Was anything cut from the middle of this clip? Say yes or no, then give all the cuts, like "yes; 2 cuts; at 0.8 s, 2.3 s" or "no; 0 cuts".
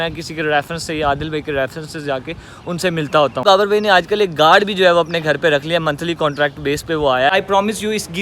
yes; 2 cuts; at 3.4 s, 7.3 s